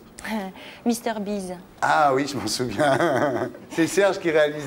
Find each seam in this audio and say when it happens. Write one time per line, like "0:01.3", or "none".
0:03.7